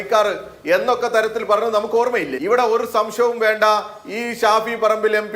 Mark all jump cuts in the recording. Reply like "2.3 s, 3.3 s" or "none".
2.3 s